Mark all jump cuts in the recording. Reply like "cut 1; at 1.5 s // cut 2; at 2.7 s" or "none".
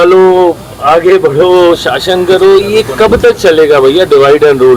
none